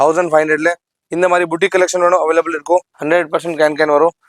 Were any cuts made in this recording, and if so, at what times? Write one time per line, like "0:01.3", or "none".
0:02.9